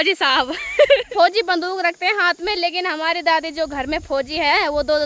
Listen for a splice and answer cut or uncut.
cut